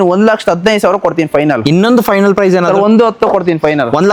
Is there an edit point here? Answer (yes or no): no